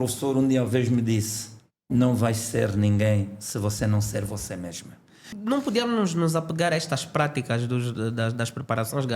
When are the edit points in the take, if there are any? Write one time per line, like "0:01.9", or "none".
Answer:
0:05.3